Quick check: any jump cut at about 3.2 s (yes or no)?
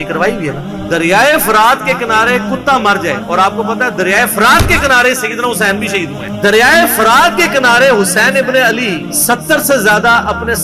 no